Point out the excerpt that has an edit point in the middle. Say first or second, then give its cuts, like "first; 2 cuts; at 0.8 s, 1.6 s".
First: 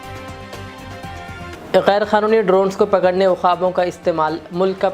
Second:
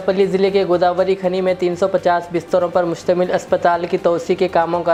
first; 1 cut; at 1.5 s